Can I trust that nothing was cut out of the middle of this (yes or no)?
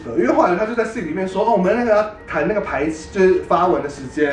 yes